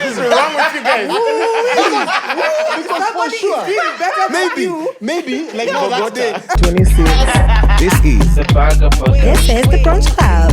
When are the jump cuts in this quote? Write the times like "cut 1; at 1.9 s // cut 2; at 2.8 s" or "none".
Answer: cut 1; at 6.6 s

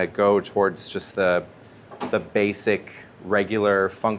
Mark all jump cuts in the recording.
none

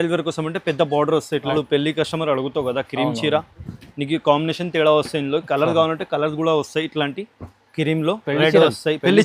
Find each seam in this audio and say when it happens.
cut 1; at 1.5 s

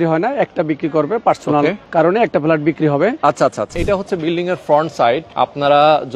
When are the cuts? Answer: cut 1; at 1.8 s // cut 2; at 3.7 s // cut 3; at 5.3 s

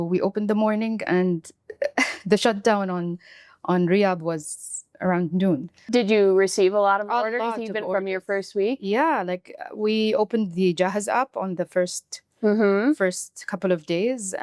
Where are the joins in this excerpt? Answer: cut 1; at 5.7 s

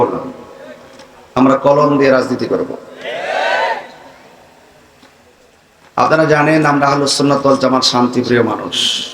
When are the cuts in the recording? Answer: cut 1; at 5.6 s

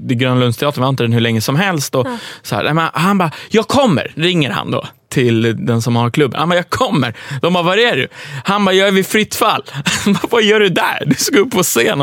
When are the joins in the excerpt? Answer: none

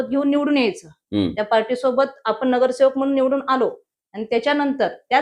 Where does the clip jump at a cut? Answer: none

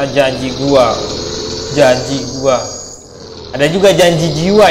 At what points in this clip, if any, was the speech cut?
none

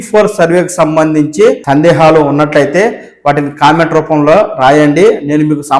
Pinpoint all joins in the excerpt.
cut 1; at 1.6 s

